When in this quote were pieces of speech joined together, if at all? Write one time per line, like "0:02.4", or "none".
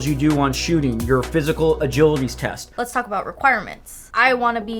none